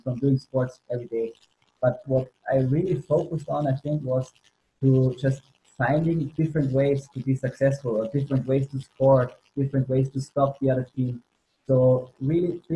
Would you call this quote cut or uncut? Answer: uncut